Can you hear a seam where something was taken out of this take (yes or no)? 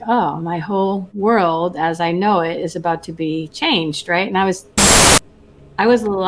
yes